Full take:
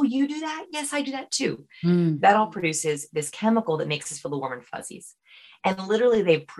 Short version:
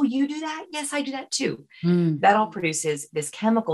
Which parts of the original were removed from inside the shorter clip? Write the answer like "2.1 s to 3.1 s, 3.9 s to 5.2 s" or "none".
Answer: none